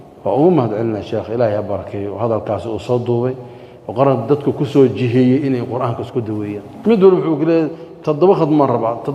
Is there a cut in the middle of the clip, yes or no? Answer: yes